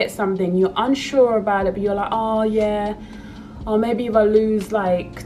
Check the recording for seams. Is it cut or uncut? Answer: uncut